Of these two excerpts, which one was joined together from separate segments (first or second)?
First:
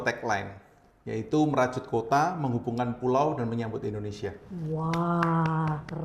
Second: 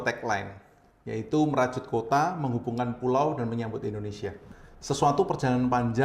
second